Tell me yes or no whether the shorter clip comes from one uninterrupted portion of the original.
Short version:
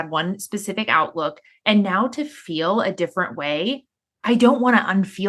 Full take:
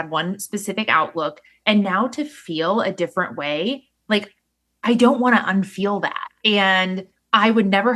no